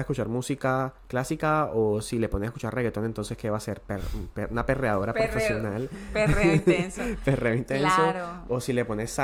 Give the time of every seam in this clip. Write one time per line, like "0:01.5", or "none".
none